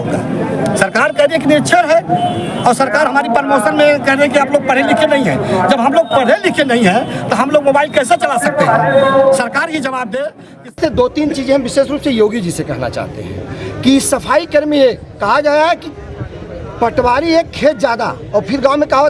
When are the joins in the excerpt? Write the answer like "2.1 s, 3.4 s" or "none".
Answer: 10.7 s